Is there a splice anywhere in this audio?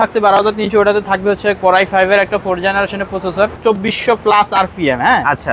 yes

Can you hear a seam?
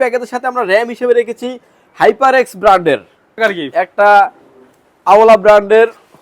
yes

